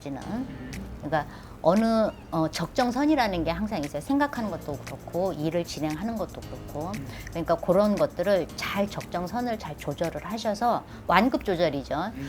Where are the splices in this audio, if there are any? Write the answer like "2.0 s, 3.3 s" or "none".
10.9 s

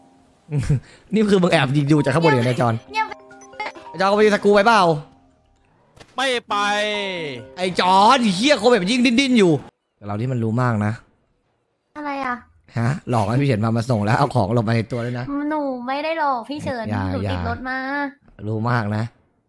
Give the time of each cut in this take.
9.7 s

